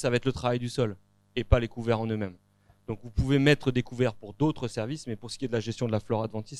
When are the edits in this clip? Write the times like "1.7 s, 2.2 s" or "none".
none